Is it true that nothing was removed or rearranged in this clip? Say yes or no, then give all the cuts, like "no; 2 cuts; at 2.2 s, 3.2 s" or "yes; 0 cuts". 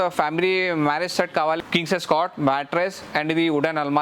no; 1 cut; at 1.6 s